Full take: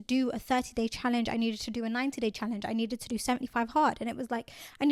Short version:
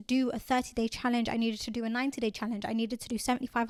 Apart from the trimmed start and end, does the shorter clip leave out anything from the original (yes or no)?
no